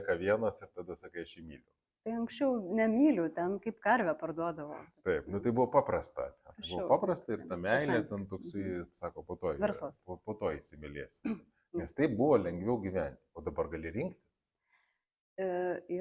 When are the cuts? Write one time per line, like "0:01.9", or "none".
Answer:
none